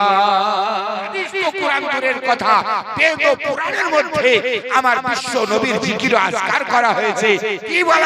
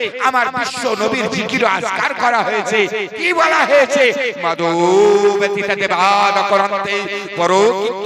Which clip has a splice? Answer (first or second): first